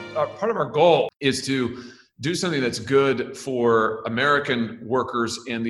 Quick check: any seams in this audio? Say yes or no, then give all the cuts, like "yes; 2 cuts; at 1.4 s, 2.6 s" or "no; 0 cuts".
yes; 1 cut; at 1.1 s